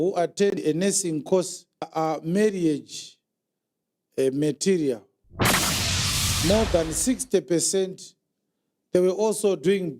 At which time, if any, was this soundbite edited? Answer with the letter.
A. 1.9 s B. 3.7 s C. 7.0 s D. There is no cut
A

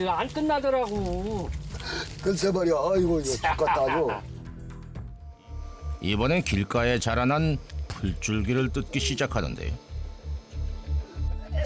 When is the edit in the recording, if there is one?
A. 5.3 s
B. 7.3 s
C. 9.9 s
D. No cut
A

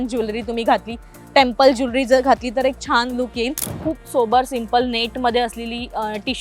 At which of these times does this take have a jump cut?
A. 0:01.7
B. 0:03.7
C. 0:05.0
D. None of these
B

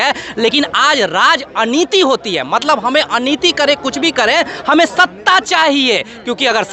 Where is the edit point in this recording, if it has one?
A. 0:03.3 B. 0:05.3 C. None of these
C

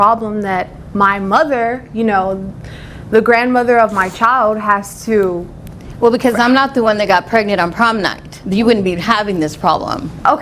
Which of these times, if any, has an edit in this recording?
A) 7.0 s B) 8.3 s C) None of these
C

